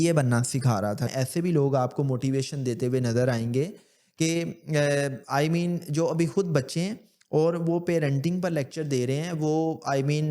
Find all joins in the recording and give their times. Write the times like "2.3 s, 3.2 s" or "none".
1.1 s